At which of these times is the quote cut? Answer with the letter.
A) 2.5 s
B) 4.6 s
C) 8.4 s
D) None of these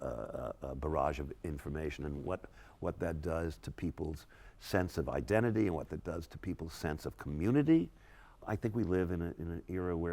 C